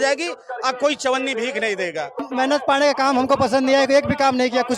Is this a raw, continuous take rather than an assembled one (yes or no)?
no